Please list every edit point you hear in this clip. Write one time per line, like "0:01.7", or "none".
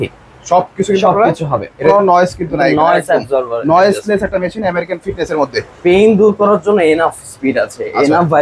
0:01.8
0:05.7